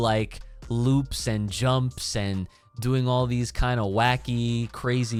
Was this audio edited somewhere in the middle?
no; 0 cuts

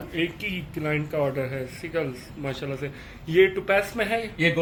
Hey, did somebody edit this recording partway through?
no; 0 cuts

